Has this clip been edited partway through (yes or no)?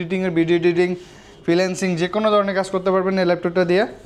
no